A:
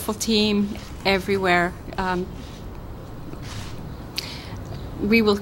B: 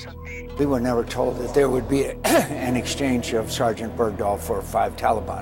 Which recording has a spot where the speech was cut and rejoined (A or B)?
B